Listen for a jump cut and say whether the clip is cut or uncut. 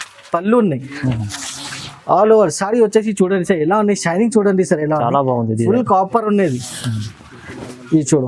uncut